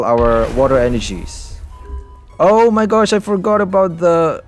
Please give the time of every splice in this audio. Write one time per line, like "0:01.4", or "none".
none